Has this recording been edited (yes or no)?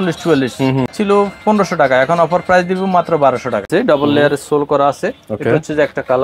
yes